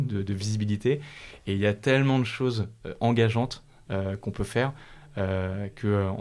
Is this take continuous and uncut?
yes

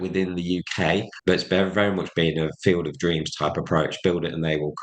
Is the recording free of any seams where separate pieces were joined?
no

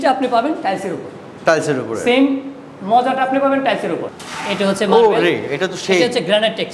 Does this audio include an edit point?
yes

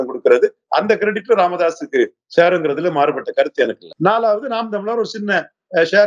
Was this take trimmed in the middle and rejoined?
yes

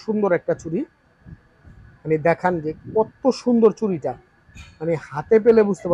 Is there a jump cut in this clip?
no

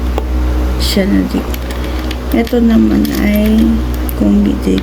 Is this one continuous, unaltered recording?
no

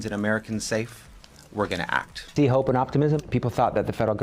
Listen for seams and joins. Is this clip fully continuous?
no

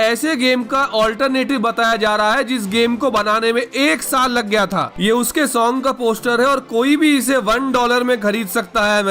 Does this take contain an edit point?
yes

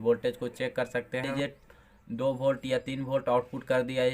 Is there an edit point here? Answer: yes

